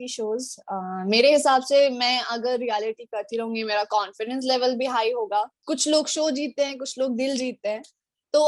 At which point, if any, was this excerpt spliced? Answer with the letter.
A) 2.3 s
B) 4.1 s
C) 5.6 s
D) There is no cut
C